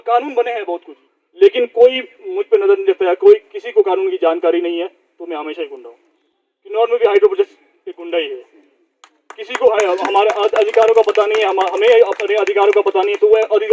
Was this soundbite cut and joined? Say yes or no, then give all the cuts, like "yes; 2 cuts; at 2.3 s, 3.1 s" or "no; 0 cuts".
no; 0 cuts